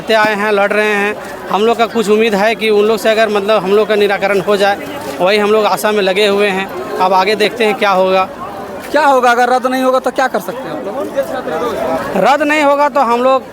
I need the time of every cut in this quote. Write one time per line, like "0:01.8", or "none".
none